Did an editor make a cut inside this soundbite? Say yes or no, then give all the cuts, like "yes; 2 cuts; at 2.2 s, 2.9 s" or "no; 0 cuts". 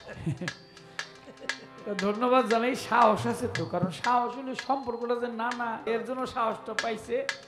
yes; 1 cut; at 5.8 s